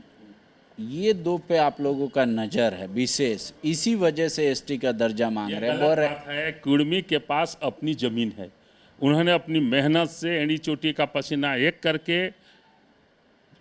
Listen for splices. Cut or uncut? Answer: uncut